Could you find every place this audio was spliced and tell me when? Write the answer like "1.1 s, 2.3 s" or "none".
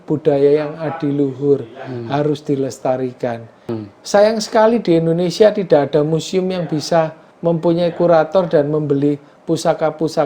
3.8 s, 7.2 s